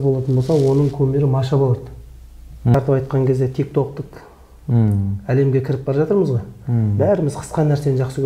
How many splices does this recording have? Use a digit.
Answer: 1